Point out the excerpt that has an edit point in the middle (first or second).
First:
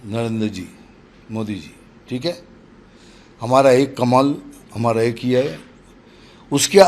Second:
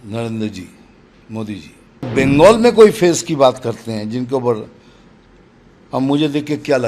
second